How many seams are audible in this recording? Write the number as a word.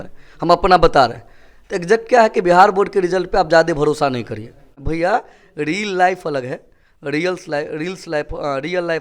one